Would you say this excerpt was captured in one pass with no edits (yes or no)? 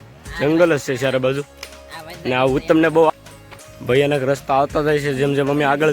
no